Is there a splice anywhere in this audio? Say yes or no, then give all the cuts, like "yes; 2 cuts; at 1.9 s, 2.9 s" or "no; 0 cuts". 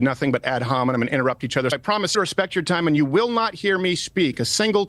yes; 1 cut; at 2.1 s